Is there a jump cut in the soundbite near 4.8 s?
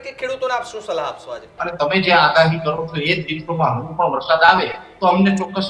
no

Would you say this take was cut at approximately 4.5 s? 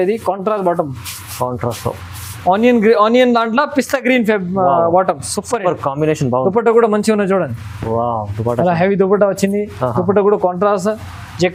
no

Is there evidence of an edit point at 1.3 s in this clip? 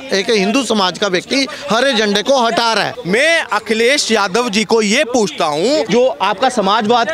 no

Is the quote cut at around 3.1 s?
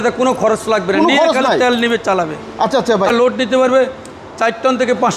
yes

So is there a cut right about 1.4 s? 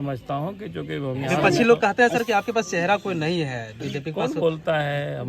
yes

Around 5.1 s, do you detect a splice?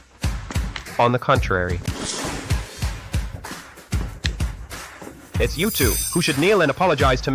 no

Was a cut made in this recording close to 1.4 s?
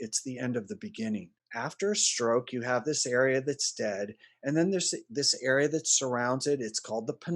yes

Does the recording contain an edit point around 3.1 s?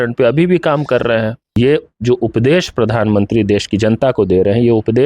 no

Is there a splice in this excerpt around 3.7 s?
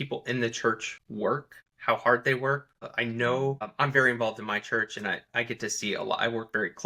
yes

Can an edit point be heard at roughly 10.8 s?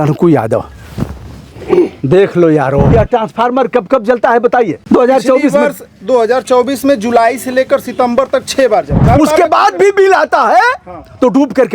no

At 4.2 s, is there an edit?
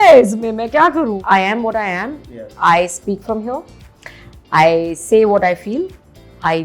no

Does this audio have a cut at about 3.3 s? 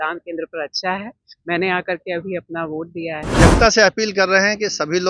yes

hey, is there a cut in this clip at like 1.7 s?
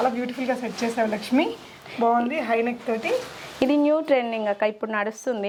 no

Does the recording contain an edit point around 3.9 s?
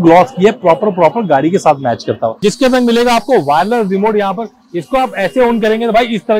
no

